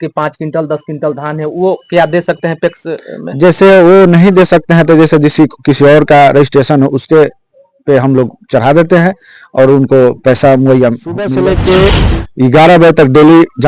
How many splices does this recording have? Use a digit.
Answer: 1